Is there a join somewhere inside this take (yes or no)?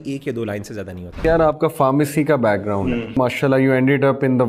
yes